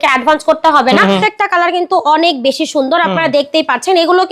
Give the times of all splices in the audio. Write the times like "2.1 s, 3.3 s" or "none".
1.0 s